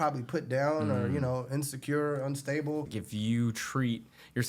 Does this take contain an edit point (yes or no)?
yes